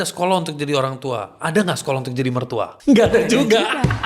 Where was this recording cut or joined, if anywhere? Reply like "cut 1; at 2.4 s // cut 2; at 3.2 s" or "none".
cut 1; at 2.7 s